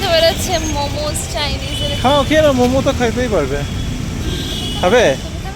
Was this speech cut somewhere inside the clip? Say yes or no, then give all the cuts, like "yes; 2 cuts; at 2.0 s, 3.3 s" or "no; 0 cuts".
no; 0 cuts